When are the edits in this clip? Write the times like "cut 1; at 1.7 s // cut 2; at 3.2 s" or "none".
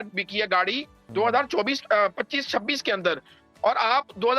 none